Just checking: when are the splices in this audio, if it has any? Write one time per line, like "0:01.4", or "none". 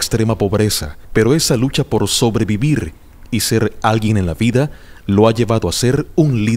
0:04.4